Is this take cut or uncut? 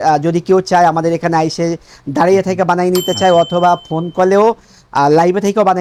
uncut